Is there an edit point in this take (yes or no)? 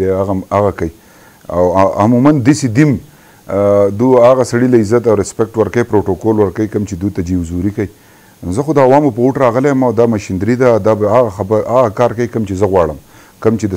no